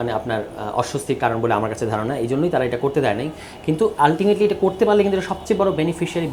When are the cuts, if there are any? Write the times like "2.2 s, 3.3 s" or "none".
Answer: none